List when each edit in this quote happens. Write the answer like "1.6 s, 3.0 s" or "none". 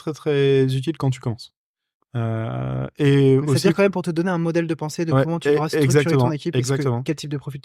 none